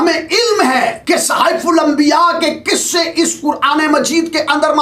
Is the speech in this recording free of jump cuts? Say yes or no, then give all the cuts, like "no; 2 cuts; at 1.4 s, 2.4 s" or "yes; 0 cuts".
no; 1 cut; at 1.0 s